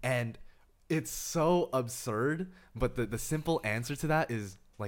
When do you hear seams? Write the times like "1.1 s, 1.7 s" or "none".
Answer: none